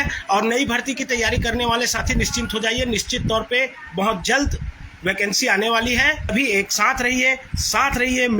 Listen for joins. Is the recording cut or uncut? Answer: cut